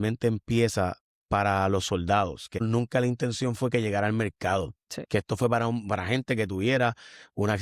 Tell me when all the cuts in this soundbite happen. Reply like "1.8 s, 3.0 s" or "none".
2.6 s